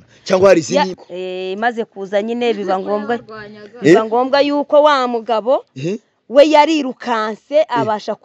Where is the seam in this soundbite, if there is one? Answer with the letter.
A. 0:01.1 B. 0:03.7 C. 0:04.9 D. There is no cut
A